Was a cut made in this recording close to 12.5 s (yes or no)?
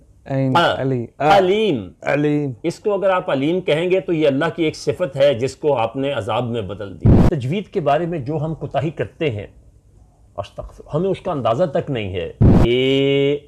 yes